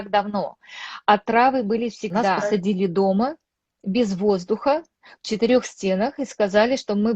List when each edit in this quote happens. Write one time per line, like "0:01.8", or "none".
0:02.5